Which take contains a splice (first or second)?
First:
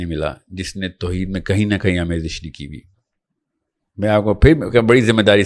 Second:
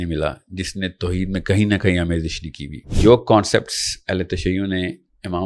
second